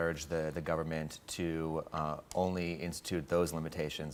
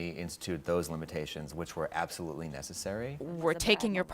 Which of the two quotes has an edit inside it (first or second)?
second